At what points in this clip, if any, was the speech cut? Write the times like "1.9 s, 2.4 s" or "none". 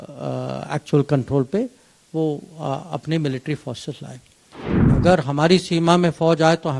4.9 s